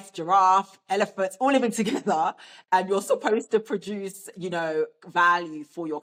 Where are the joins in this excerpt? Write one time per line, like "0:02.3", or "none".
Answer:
none